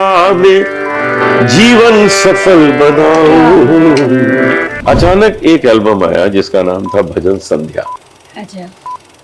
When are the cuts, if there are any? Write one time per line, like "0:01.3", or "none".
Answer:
0:04.7